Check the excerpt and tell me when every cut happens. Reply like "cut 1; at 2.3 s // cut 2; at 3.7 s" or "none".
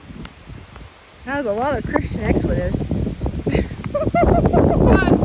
none